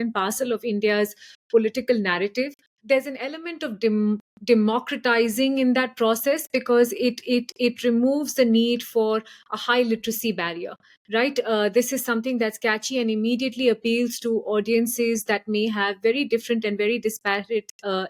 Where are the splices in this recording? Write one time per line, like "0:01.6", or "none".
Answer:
0:02.6